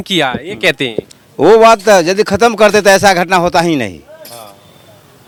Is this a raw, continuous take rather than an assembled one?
yes; 0 cuts

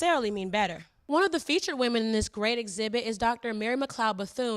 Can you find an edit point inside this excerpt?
yes; 1 cut; at 1.0 s

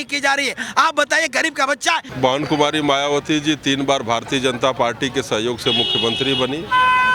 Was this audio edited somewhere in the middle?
yes; 1 cut; at 2.1 s

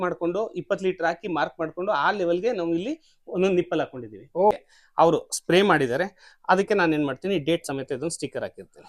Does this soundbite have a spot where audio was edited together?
yes; 1 cut; at 4.5 s

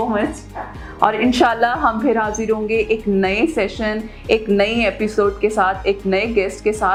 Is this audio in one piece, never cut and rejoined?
yes; 0 cuts

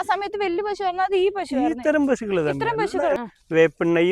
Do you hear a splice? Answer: yes; 1 cut; at 3.2 s

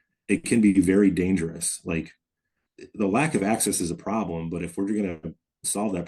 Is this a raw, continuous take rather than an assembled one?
yes; 0 cuts

